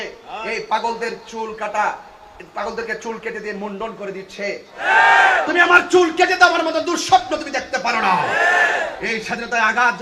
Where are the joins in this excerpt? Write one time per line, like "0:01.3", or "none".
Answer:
0:04.8